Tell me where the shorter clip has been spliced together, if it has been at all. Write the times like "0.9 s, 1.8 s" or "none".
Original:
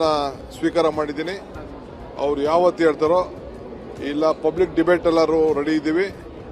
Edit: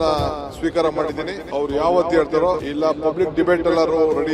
1.3 s, 2.7 s

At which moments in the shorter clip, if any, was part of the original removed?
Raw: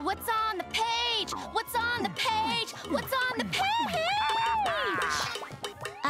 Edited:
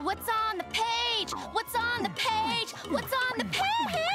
none

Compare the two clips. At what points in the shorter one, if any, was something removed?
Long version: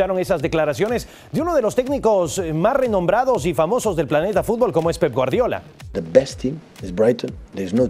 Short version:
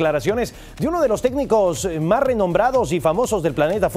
none

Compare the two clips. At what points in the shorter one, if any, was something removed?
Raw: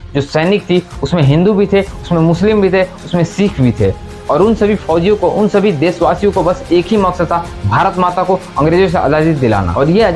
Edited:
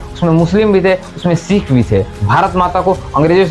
2.2 s

